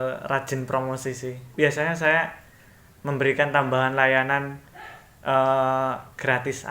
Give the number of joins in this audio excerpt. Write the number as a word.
one